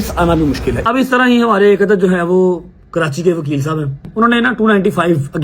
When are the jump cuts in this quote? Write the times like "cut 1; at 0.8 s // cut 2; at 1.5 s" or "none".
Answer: cut 1; at 0.8 s // cut 2; at 4.1 s